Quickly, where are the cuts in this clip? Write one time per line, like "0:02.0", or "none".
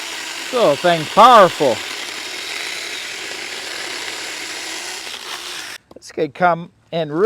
0:05.8